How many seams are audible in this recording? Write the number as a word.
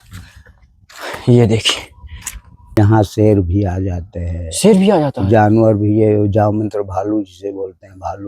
one